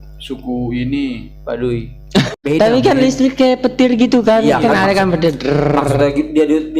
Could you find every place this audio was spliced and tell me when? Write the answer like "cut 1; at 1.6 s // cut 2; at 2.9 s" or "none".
cut 1; at 2.3 s